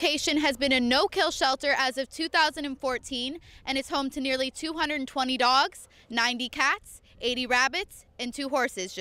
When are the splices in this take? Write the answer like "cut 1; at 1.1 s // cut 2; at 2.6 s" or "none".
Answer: none